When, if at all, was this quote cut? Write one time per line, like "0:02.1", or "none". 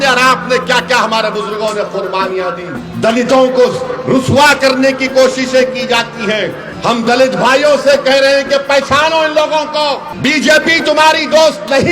0:02.8
0:06.7
0:10.1